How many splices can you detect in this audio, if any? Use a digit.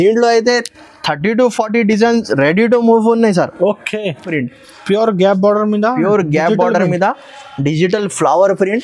1